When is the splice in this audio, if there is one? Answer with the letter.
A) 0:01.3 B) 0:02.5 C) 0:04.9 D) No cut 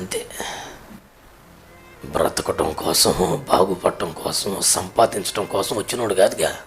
A